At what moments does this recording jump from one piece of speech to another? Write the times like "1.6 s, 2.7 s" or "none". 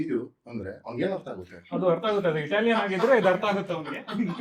none